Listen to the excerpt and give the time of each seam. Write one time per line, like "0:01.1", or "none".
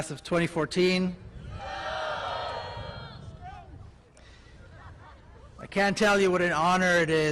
0:01.5